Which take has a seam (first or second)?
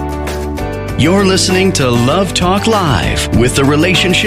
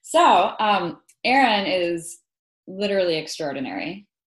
first